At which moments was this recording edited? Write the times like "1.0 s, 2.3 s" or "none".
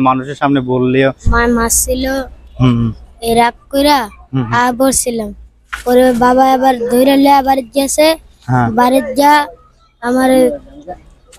1.2 s